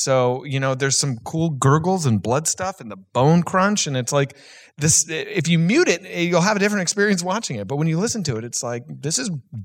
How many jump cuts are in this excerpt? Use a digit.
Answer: 0